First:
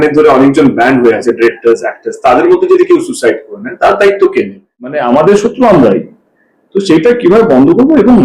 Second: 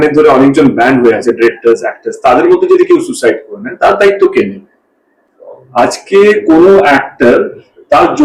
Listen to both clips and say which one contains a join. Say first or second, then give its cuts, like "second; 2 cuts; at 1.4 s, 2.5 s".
first; 1 cut; at 5.0 s